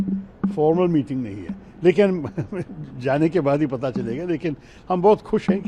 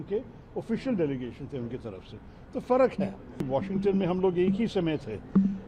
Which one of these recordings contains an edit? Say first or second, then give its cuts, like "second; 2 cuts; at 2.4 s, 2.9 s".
second; 1 cut; at 3.5 s